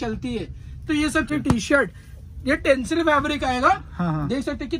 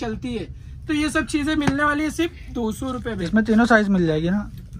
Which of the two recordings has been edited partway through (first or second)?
first